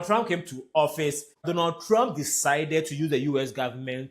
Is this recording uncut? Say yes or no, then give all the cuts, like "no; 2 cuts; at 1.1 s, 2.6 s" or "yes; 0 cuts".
no; 1 cut; at 1.5 s